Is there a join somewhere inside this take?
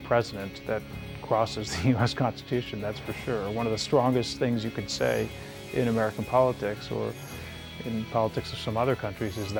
no; 0 cuts

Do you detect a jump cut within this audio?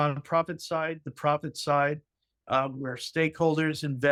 no; 0 cuts

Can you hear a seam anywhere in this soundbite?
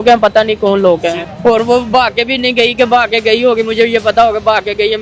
yes; 1 cut; at 1.2 s

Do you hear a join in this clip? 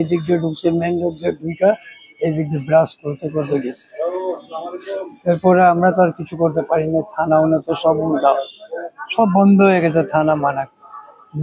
no; 0 cuts

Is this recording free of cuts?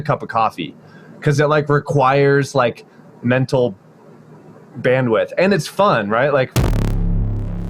no; 1 cut; at 6.5 s

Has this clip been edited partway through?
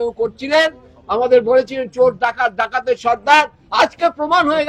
no; 0 cuts

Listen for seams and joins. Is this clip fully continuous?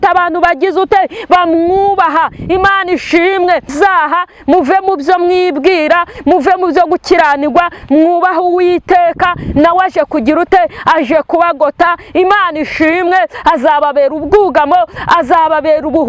no; 1 cut; at 3.7 s

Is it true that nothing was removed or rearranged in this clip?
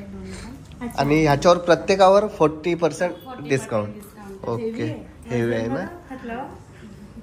yes; 0 cuts

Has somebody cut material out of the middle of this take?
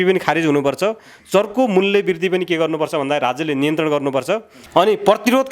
yes; 1 cut; at 4.5 s

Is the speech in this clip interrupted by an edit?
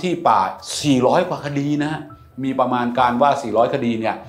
yes; 1 cut; at 2.3 s

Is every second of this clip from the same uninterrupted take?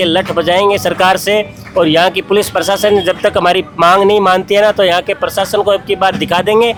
yes; 0 cuts

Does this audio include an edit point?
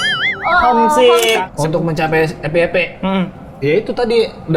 yes; 1 cut; at 1.5 s

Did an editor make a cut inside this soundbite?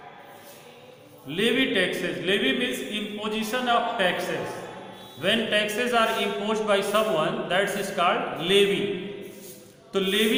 no; 0 cuts

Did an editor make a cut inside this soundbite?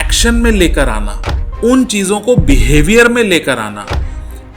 no; 0 cuts

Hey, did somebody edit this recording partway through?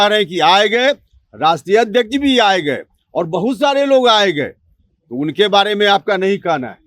no; 0 cuts

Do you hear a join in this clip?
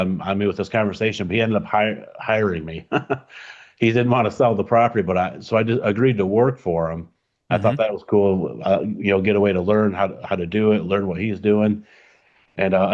no; 0 cuts

